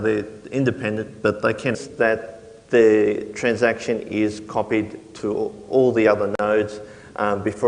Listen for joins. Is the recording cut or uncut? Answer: uncut